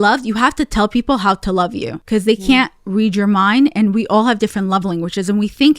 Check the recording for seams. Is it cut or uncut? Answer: cut